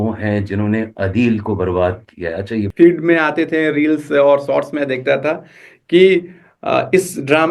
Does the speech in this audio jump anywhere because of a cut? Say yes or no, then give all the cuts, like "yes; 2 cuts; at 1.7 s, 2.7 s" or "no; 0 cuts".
yes; 1 cut; at 2.7 s